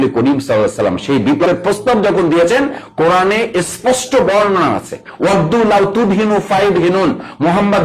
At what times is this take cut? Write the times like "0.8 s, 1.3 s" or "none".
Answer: 1.4 s